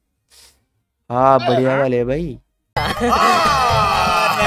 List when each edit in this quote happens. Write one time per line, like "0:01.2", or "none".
none